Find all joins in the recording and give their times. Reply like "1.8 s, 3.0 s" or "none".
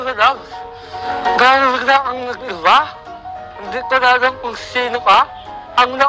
0.9 s